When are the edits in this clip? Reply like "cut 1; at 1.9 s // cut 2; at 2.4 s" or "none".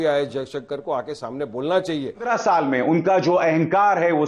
cut 1; at 2.3 s